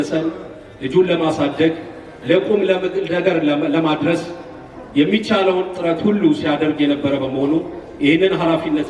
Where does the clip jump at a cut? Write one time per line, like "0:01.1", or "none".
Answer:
none